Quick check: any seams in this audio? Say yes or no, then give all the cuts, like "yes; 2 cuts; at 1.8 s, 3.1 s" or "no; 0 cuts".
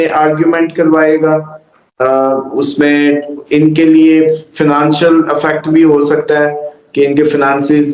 no; 0 cuts